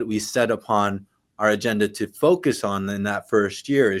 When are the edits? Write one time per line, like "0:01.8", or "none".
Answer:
none

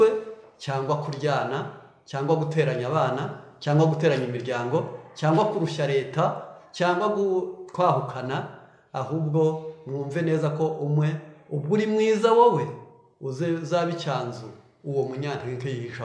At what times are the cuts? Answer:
none

